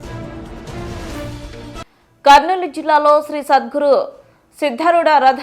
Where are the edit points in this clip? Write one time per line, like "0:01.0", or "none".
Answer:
0:01.3